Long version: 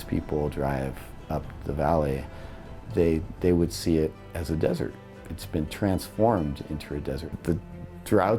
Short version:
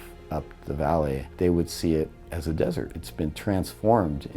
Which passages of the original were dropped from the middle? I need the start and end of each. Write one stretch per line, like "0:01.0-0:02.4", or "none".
0:02.3-0:03.3
0:05.0-0:05.4